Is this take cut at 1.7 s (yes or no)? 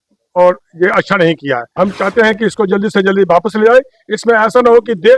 yes